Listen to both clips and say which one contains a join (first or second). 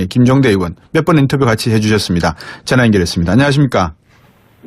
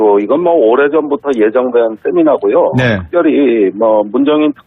second